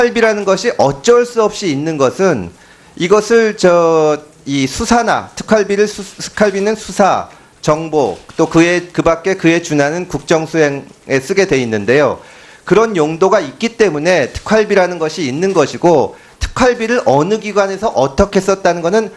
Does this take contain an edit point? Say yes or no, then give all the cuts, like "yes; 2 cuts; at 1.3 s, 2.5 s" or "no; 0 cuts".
yes; 1 cut; at 10.2 s